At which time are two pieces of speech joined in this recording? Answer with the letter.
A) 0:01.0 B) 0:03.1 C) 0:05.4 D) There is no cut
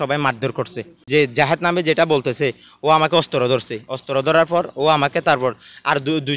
A